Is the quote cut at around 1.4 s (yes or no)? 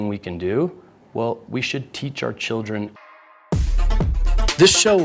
no